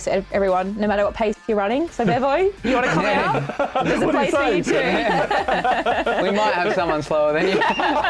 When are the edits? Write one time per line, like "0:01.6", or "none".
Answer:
none

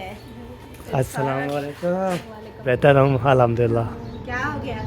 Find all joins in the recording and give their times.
0:02.7

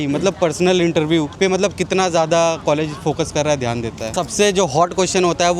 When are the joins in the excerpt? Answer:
0:01.3
0:04.1

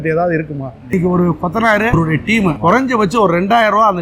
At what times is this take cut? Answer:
0:00.9
0:02.5

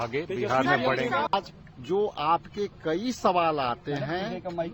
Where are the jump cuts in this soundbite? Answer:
0:01.5

